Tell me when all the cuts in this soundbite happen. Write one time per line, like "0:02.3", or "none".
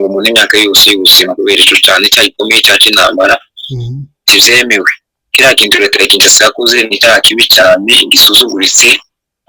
none